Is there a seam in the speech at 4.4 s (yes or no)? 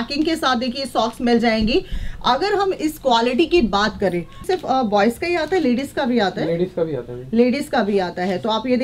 yes